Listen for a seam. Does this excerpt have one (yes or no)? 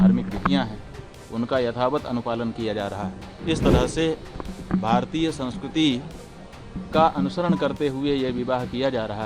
yes